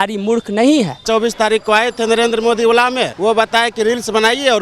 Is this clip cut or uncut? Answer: cut